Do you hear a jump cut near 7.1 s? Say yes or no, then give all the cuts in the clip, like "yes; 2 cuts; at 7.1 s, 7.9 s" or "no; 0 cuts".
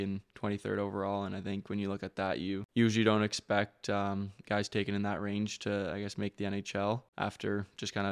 yes; 2 cuts; at 2.7 s, 7.1 s